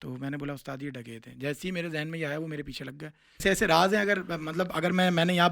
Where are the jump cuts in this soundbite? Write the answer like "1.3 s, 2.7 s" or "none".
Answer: 3.4 s

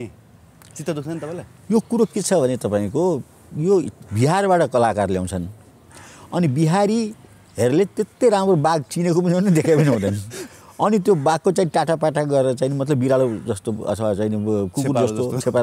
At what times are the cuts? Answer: none

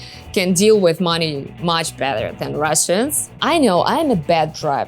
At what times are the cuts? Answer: 3.3 s

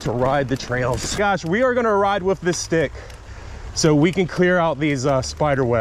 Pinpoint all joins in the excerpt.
1.2 s

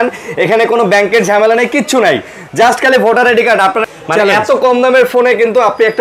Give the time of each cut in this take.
3.8 s

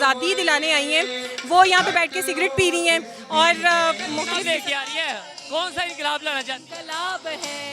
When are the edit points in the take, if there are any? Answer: 4.3 s

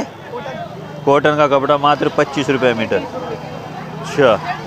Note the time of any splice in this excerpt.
none

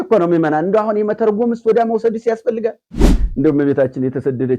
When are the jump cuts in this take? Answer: 3.1 s

